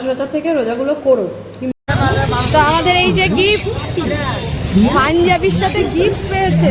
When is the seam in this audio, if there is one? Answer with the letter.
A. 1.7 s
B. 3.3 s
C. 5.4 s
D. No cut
A